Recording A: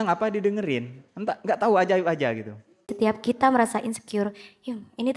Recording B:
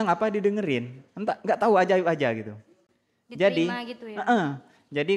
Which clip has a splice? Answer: A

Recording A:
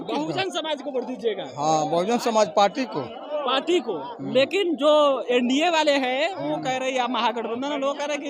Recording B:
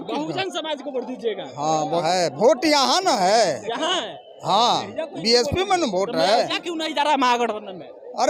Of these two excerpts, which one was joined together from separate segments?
B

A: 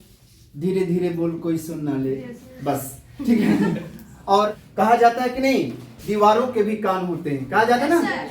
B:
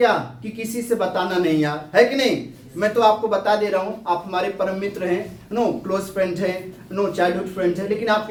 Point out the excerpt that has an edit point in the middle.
A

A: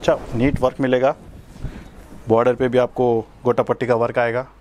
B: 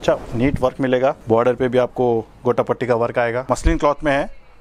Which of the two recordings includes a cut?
B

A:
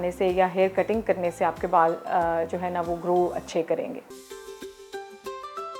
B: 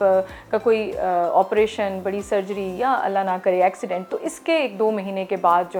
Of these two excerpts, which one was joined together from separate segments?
A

